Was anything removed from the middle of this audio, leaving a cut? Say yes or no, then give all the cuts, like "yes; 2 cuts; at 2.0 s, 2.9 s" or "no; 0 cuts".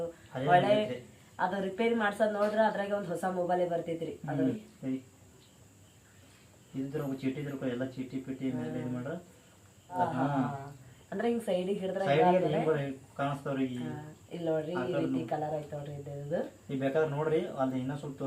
yes; 2 cuts; at 4.6 s, 10.0 s